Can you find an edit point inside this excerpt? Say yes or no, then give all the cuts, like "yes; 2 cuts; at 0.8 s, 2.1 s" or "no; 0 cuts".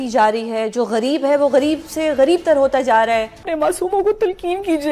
yes; 1 cut; at 3.4 s